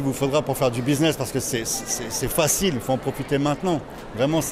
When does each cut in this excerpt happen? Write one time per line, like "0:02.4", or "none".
none

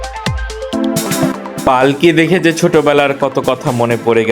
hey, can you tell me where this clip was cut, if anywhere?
0:01.1

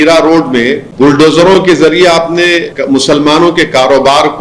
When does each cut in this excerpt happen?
0:00.9
0:02.7

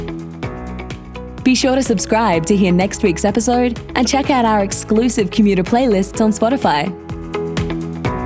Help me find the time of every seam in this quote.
0:01.3
0:07.1

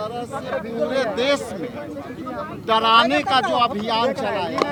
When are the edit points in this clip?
none

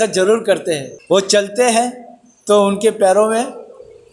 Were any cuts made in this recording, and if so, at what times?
0:00.9

